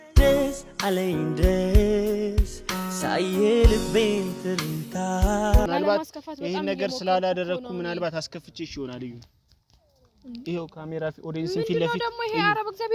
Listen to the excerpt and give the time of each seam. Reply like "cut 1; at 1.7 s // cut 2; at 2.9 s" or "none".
cut 1; at 5.7 s

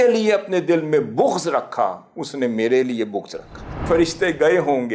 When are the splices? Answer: cut 1; at 3.8 s

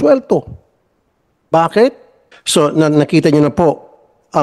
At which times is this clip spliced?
cut 1; at 2.3 s

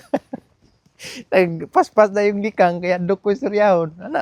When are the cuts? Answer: none

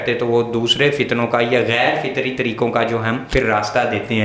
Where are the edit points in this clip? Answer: cut 1; at 3.2 s

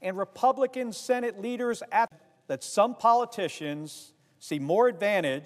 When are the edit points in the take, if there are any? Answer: none

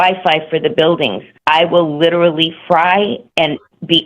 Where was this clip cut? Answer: cut 1; at 1.3 s

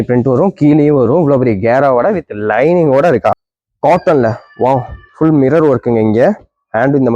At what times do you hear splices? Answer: cut 1; at 3.3 s

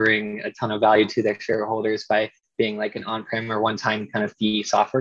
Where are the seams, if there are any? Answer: none

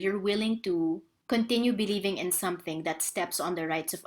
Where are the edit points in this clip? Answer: cut 1; at 1.1 s

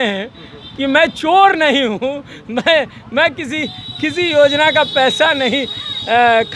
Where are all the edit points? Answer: none

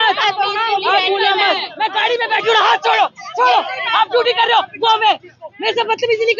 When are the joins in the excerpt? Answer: cut 1; at 1.7 s

